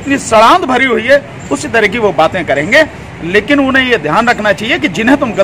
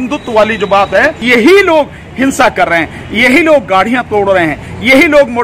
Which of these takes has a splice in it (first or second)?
second